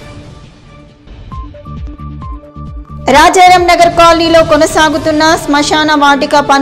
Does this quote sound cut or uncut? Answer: cut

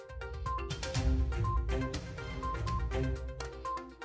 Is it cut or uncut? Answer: uncut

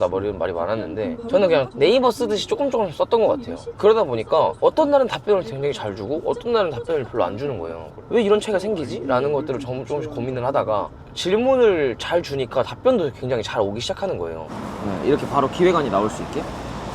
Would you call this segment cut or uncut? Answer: cut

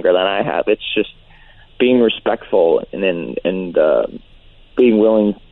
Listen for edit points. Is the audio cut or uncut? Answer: uncut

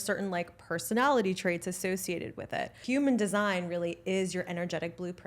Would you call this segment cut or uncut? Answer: cut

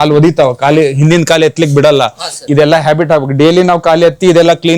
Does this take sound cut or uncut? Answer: cut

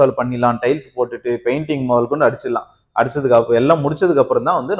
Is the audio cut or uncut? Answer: uncut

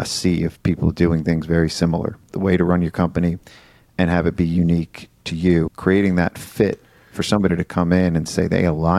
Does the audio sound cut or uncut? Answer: cut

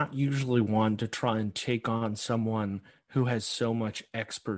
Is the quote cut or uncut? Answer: uncut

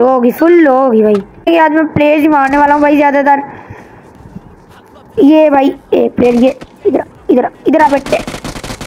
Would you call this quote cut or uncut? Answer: cut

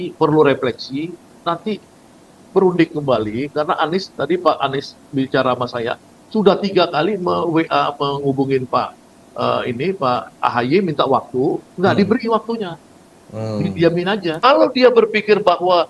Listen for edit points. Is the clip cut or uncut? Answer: cut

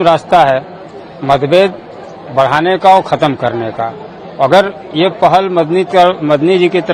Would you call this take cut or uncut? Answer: uncut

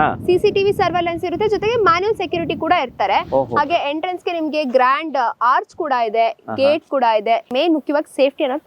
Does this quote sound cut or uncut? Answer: cut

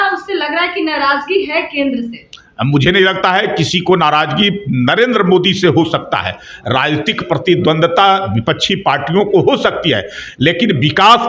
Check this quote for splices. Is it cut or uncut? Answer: uncut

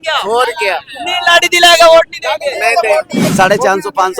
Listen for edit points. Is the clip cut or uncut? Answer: cut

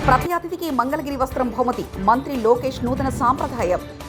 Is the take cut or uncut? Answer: uncut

